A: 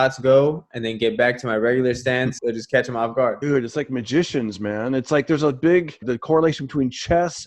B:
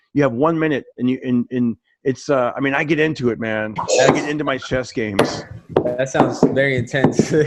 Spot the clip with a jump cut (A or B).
A